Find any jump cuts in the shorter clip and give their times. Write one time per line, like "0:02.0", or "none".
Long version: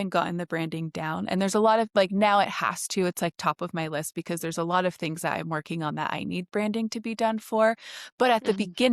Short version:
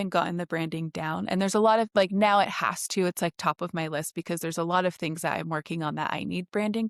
none